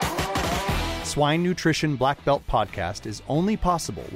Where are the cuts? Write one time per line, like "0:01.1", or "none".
0:00.9